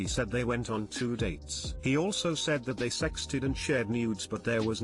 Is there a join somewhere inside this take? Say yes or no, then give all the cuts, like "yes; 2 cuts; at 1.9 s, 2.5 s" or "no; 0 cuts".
no; 0 cuts